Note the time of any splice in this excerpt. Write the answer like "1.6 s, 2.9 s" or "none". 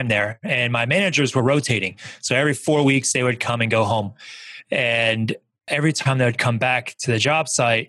5.7 s